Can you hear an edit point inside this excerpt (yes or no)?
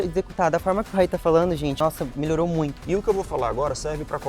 yes